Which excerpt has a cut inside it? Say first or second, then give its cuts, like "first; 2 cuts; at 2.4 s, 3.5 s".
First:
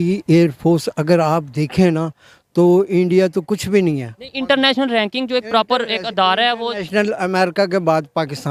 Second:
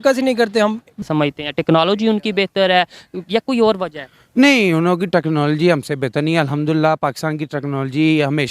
second; 1 cut; at 1.0 s